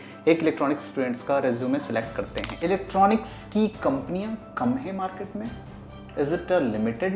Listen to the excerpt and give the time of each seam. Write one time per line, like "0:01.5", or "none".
0:02.4